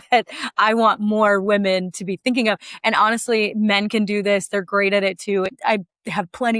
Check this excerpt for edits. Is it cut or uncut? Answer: cut